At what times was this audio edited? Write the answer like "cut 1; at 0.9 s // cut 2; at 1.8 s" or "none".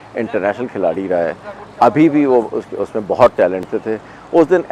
cut 1; at 3.7 s